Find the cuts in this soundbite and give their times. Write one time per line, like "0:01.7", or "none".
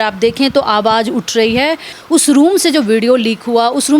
0:01.9